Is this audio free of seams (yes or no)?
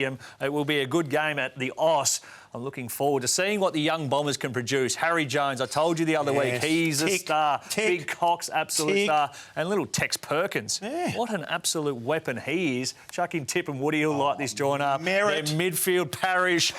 yes